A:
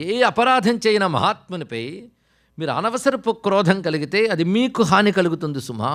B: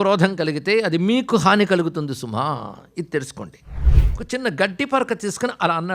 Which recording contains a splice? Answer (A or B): B